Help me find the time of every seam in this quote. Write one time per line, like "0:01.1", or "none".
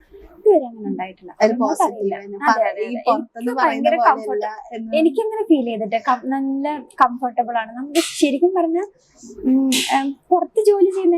none